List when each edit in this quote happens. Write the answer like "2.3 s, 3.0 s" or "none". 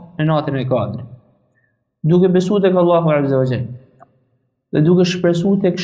none